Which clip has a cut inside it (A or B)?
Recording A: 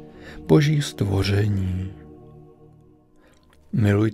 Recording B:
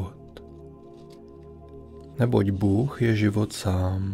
A